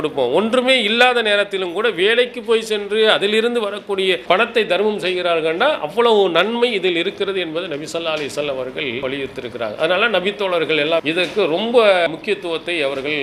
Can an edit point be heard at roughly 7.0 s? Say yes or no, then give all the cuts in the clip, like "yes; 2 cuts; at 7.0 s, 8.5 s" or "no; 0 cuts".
no; 4 cuts; at 4.2 s, 9.0 s, 11.0 s, 12.1 s